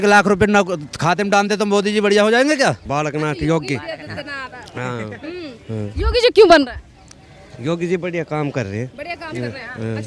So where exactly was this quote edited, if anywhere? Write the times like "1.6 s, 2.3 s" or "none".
2.8 s